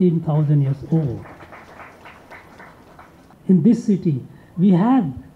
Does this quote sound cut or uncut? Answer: cut